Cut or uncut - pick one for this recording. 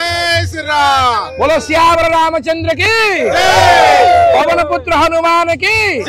uncut